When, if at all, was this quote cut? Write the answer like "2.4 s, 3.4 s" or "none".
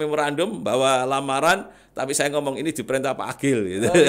none